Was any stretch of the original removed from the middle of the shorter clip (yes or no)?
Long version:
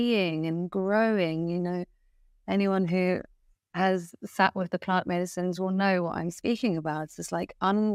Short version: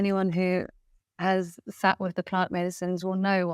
no